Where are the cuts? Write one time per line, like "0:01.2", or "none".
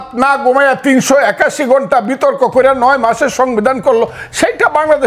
none